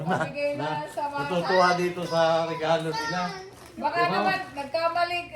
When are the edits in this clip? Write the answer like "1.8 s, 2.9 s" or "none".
none